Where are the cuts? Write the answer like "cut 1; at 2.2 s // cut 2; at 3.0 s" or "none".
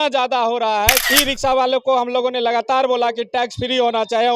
cut 1; at 1.0 s